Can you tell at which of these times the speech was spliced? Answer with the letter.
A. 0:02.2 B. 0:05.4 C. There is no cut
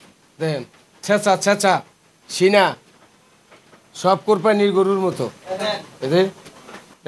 C